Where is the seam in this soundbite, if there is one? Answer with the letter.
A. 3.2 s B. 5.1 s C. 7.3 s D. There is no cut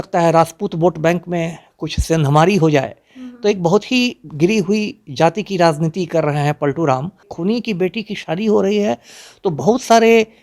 C